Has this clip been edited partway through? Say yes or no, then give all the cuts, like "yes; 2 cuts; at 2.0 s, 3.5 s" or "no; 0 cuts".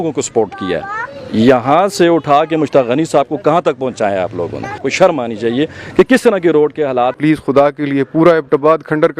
yes; 2 cuts; at 4.8 s, 7.1 s